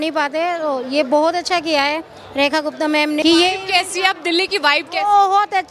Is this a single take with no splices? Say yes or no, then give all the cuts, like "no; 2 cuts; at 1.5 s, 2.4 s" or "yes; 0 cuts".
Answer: no; 1 cut; at 3.2 s